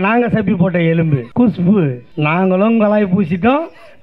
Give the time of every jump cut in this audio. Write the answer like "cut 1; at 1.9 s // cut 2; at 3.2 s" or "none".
cut 1; at 1.2 s // cut 2; at 2.0 s